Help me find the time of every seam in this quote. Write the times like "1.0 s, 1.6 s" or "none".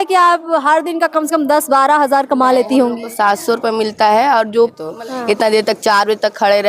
4.9 s

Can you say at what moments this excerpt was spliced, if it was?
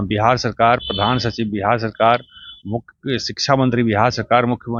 none

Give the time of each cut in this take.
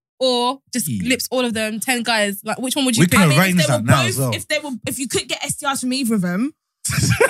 none

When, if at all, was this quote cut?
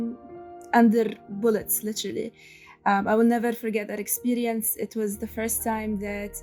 none

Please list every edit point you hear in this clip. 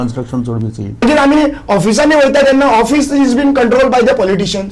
1.0 s

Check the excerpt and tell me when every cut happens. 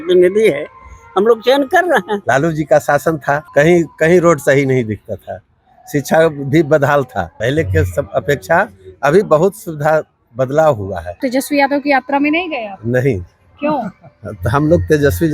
2.2 s, 3.4 s, 7.3 s, 11.2 s

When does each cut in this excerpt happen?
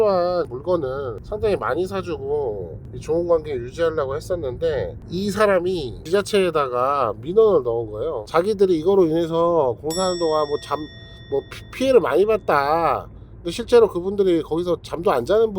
5.0 s, 5.9 s, 8.2 s

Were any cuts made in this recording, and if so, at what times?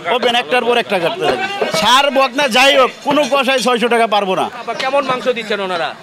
1.5 s, 4.7 s

